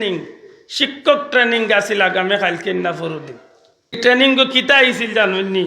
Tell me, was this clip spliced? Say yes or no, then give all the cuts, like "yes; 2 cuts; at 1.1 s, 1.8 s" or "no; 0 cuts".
yes; 1 cut; at 4.0 s